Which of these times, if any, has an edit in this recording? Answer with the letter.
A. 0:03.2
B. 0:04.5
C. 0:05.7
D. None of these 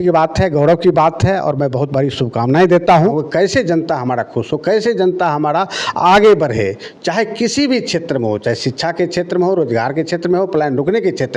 A